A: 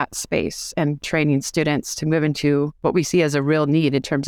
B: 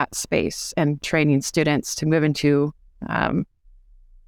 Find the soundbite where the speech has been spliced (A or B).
A